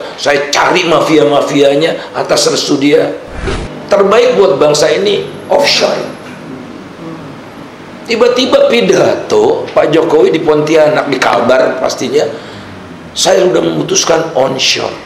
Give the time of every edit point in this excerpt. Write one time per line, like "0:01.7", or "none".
0:03.6